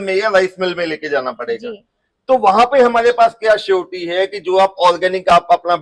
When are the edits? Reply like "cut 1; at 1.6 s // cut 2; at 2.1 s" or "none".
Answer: none